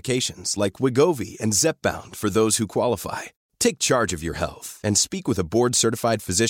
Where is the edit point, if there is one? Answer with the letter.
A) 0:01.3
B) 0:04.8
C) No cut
C